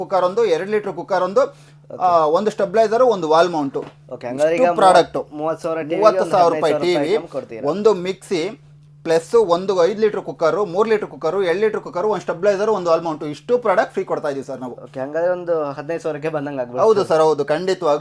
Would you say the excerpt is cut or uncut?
uncut